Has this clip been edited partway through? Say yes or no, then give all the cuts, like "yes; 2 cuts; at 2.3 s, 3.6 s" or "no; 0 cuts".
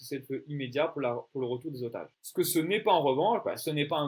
yes; 1 cut; at 2.2 s